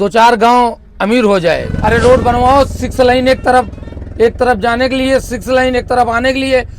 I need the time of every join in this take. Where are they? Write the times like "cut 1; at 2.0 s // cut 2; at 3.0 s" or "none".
cut 1; at 1.7 s